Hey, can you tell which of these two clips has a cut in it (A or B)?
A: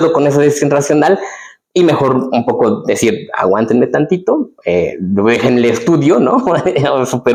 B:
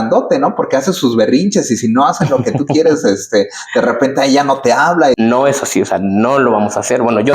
B